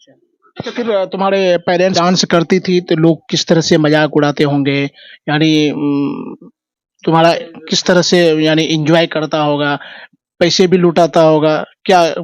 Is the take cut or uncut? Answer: cut